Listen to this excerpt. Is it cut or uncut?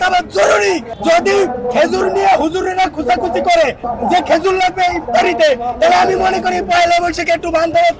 cut